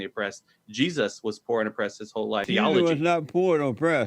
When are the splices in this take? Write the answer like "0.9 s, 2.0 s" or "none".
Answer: 2.5 s